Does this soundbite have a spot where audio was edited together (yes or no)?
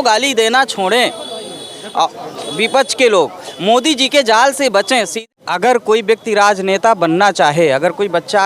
yes